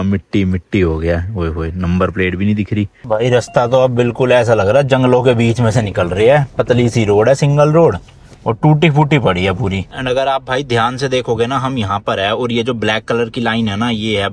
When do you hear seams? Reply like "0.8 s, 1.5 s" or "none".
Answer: 3.0 s, 9.9 s